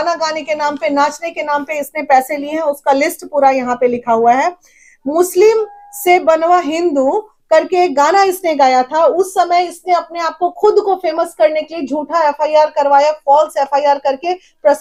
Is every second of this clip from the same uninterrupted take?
yes; 0 cuts

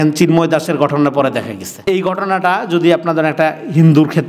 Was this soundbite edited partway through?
yes; 1 cut; at 1.9 s

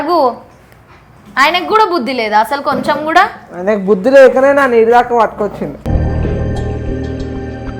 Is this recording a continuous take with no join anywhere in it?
yes; 0 cuts

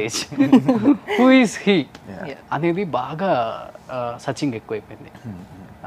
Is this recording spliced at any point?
no; 0 cuts

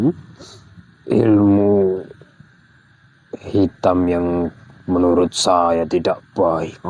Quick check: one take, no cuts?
yes; 0 cuts

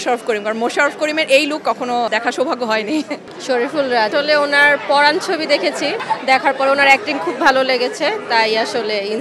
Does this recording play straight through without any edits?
no; 4 cuts; at 2.1 s, 3.3 s, 4.1 s, 6.0 s

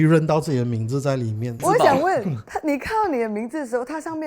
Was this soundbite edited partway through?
yes; 1 cut; at 1.6 s

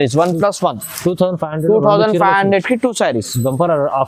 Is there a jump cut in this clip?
no; 0 cuts

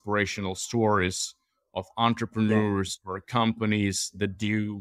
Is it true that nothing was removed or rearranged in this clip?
yes; 0 cuts

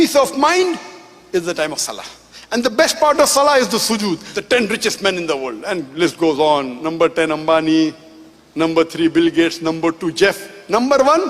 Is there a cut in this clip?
yes; 2 cuts; at 4.3 s, 6.8 s

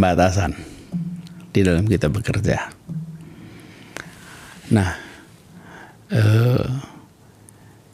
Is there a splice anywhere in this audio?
no; 0 cuts

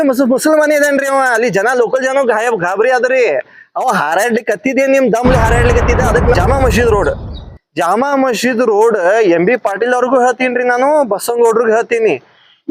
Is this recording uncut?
no; 1 cut; at 6.3 s

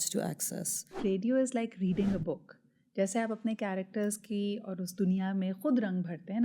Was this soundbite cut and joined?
yes; 1 cut; at 1.0 s

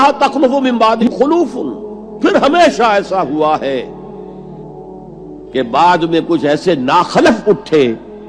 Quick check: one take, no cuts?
no; 3 cuts; at 1.0 s, 3.9 s, 5.3 s

